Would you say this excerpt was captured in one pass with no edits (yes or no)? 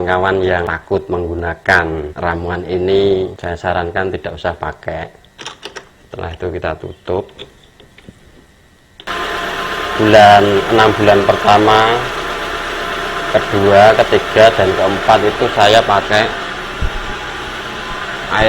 no